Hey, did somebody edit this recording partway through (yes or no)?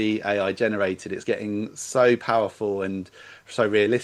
no